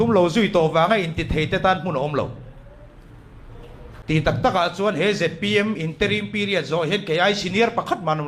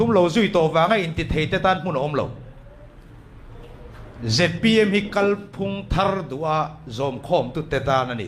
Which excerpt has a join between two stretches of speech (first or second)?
first